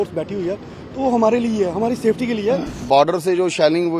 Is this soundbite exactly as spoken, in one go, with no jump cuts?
no; 1 cut; at 2.8 s

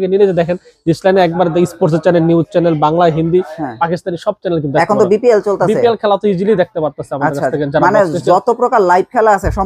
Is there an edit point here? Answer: no; 0 cuts

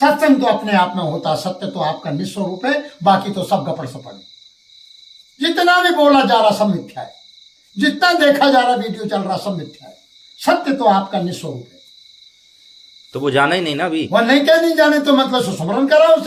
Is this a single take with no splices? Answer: yes; 0 cuts

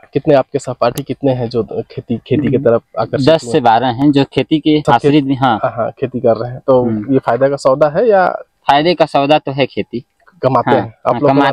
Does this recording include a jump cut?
yes; 2 cuts; at 4.8 s, 8.5 s

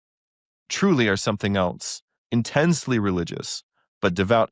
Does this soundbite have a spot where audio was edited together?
no; 0 cuts

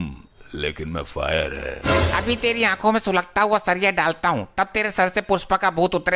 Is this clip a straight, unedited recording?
yes; 0 cuts

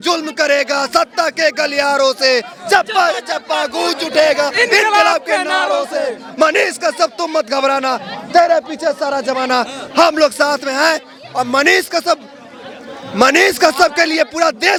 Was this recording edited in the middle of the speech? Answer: no; 0 cuts

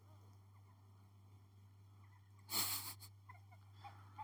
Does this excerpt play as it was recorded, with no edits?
yes; 0 cuts

